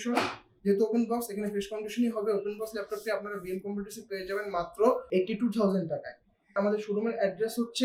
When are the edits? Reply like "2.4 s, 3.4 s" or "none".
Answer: 6.6 s